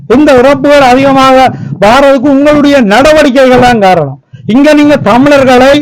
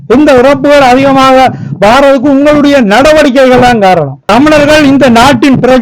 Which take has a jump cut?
second; 1 cut; at 4.2 s

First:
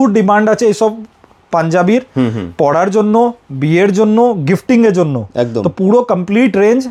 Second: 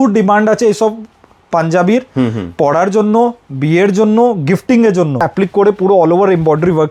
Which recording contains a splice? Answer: second; 1 cut; at 5.3 s

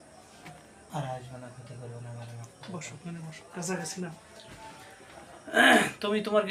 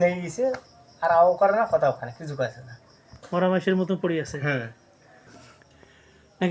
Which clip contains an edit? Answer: second; 1 cut; at 5.3 s

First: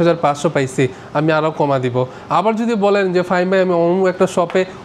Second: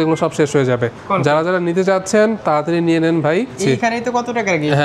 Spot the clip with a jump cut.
second; 2 cuts; at 1.0 s, 3.6 s

